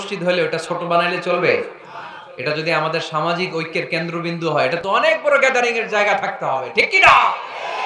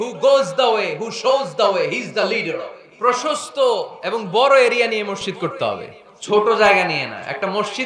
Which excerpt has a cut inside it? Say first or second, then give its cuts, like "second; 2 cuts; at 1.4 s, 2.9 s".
second; 1 cut; at 2.8 s